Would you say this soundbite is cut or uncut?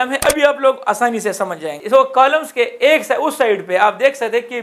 uncut